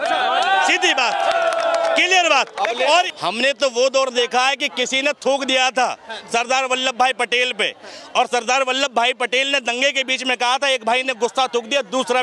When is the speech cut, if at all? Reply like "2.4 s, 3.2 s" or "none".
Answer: 3.1 s